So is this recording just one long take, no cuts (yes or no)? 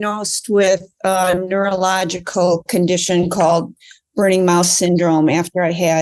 yes